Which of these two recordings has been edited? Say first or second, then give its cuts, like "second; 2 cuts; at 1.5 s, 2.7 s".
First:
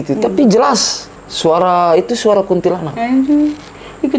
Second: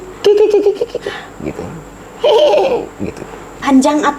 second; 1 cut; at 3.2 s